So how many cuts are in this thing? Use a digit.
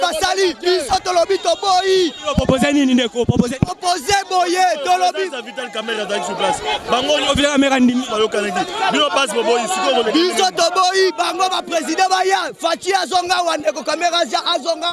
0